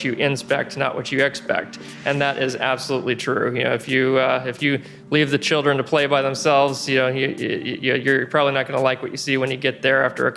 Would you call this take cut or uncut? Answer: uncut